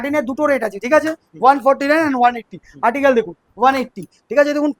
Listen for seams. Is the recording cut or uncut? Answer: uncut